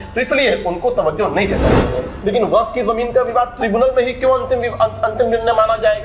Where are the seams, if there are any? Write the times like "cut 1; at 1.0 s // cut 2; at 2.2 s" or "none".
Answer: cut 1; at 2.0 s